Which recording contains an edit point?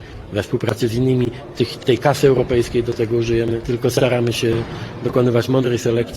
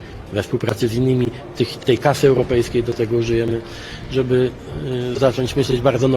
first; 1 cut; at 3.6 s

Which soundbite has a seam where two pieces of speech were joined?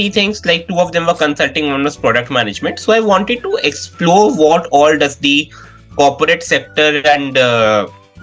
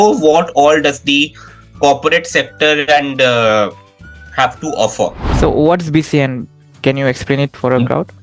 second; 1 cut; at 5.3 s

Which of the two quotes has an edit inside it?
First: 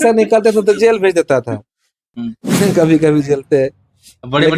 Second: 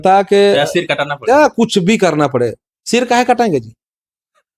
first; 1 cut; at 2.1 s

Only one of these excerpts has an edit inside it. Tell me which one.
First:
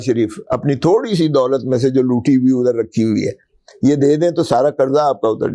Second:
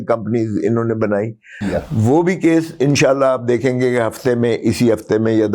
second; 1 cut; at 1.6 s

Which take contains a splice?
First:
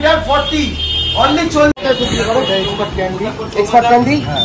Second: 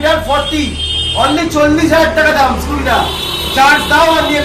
first; 1 cut; at 1.8 s

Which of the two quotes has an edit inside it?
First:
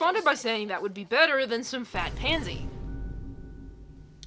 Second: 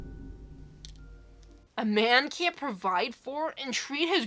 second; 1 cut; at 1.8 s

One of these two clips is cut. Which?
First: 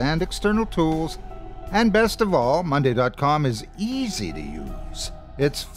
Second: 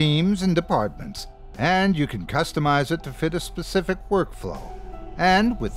first; 1 cut; at 1.2 s

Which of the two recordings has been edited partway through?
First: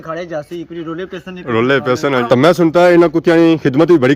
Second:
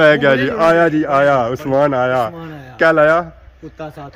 first; 1 cut; at 2.2 s

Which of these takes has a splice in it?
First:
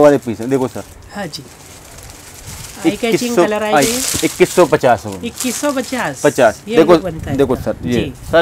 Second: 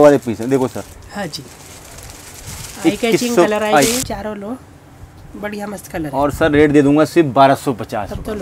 second; 1 cut; at 4.1 s

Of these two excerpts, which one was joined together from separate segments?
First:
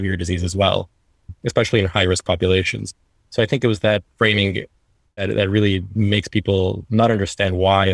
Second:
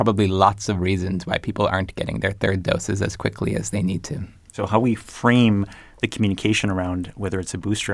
first; 1 cut; at 1.3 s

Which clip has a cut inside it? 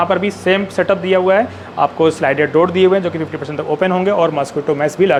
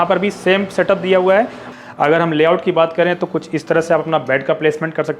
second; 1 cut; at 1.6 s

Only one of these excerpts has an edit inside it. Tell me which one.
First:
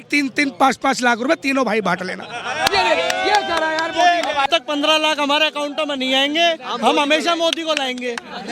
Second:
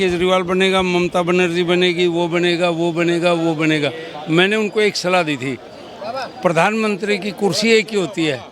first; 1 cut; at 4.5 s

